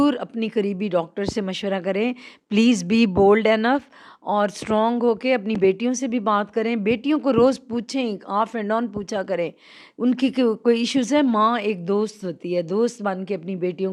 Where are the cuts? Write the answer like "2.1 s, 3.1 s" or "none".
none